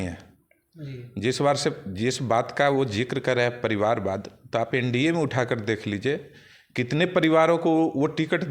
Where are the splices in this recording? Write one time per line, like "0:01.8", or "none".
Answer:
none